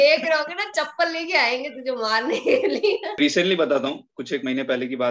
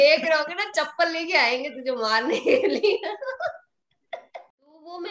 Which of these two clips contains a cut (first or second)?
first